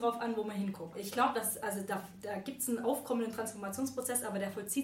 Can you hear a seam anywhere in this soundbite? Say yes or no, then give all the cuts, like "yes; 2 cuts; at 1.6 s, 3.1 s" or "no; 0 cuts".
yes; 1 cut; at 0.9 s